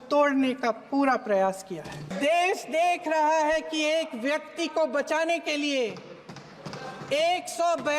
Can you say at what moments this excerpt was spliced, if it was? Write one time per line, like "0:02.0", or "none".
0:02.0